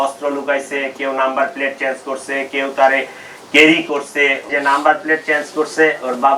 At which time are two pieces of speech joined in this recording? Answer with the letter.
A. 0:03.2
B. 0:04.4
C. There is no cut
B